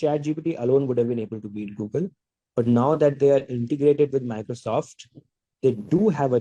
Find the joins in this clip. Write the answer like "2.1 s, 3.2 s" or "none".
none